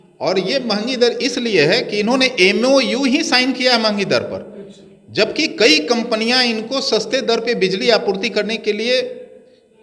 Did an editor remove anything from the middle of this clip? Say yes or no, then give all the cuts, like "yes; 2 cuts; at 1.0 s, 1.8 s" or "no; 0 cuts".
no; 0 cuts